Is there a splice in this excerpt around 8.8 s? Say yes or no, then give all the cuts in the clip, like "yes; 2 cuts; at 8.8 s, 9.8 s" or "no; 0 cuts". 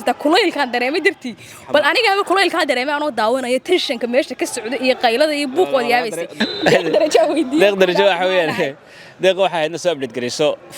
no; 1 cut; at 6.3 s